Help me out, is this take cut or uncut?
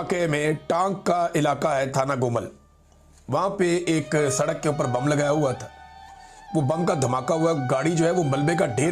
uncut